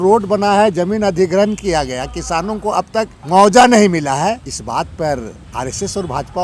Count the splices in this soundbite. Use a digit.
3